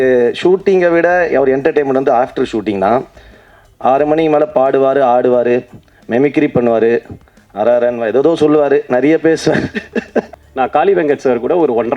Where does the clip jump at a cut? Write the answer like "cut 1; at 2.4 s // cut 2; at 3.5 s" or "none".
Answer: cut 1; at 10.4 s

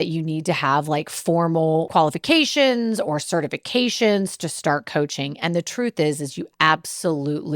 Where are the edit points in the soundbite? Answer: cut 1; at 1.9 s

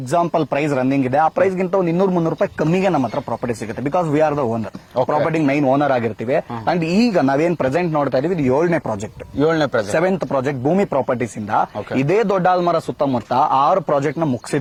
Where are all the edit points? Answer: none

